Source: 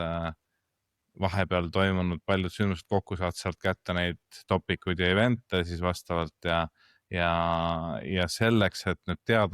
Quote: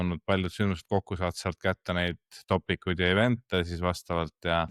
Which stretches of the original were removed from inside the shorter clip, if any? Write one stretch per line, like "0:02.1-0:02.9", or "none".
none